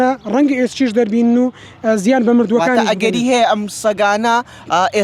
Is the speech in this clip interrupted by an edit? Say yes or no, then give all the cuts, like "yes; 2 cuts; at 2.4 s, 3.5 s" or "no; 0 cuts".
no; 0 cuts